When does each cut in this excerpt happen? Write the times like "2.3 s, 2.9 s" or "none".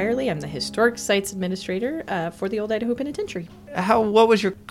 none